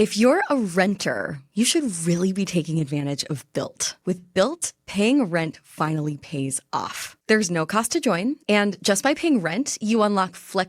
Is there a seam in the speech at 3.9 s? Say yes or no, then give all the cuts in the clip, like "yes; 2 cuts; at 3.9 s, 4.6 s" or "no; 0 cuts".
yes; 1 cut; at 3.9 s